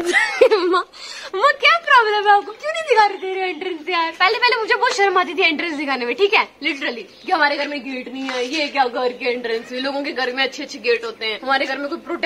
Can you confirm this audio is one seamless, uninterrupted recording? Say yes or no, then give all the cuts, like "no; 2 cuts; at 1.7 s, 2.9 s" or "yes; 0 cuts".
yes; 0 cuts